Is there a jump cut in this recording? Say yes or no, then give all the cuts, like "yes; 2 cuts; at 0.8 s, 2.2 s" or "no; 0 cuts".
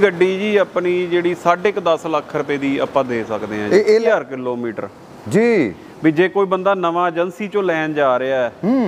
yes; 1 cut; at 3.9 s